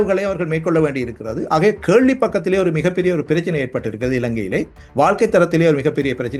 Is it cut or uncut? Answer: uncut